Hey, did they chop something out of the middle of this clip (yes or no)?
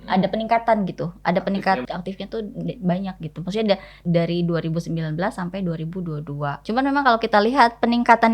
yes